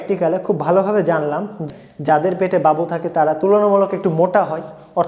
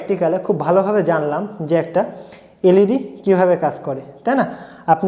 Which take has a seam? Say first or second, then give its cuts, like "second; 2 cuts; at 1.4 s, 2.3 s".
first; 1 cut; at 1.6 s